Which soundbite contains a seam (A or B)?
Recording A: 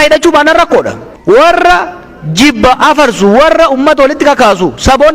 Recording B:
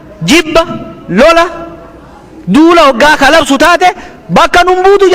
A